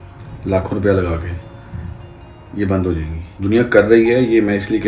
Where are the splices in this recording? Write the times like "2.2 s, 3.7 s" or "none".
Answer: 3.2 s